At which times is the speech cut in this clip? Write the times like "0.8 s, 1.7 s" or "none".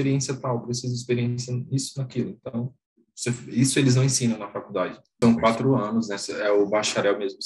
5.2 s